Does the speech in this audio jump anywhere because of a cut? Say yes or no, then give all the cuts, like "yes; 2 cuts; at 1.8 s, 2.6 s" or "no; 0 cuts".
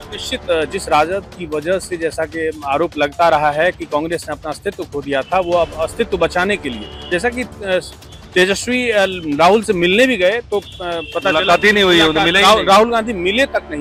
no; 0 cuts